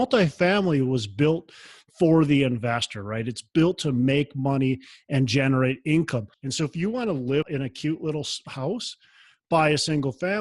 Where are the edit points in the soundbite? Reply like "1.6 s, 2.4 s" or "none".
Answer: 6.4 s, 7.4 s